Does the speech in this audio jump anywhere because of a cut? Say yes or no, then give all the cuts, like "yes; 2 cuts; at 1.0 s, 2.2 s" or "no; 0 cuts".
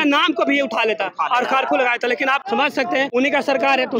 yes; 1 cut; at 2.8 s